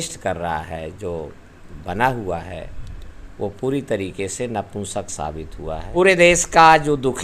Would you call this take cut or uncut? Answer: cut